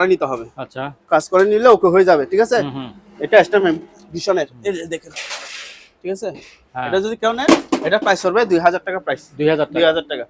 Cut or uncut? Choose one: uncut